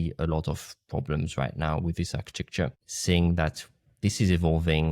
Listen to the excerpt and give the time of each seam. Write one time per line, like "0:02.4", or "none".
0:02.9